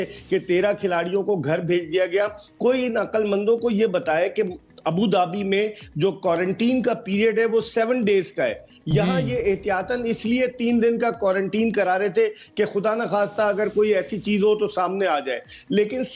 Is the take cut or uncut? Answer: uncut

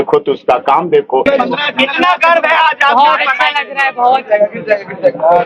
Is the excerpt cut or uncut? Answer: cut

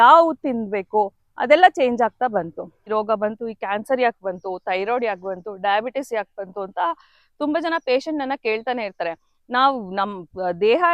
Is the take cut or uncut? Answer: cut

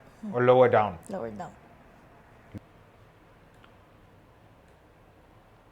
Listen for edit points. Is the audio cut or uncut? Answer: cut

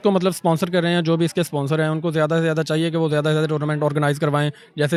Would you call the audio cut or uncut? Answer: uncut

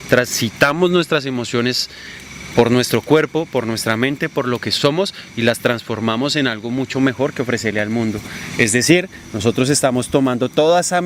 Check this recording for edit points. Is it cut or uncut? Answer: uncut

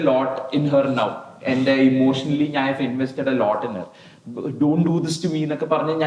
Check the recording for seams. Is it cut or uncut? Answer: uncut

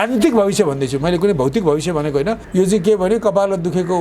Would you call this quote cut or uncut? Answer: cut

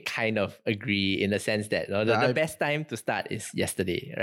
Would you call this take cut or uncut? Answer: uncut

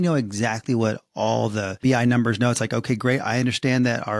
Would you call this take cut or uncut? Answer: cut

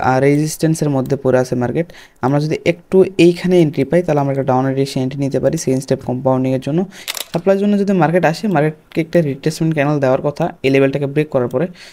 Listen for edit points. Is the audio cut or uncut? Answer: cut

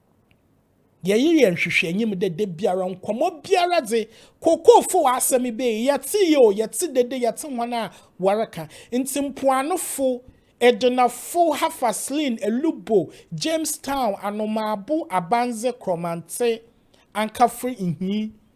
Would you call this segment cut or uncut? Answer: uncut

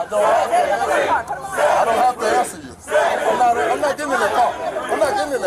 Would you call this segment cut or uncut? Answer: uncut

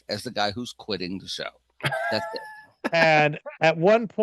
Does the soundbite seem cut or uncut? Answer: cut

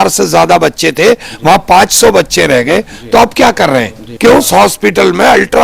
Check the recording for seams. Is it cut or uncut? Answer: cut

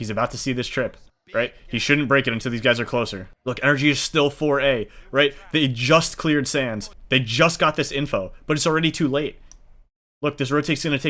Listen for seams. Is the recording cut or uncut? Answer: uncut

